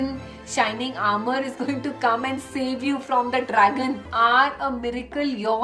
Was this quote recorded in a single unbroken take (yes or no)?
no